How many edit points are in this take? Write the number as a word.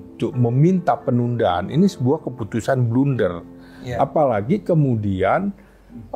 zero